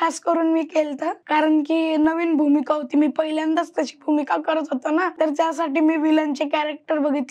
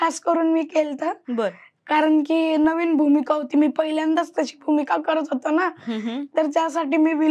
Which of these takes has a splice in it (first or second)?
first